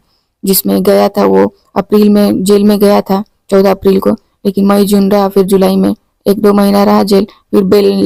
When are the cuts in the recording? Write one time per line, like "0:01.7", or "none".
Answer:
none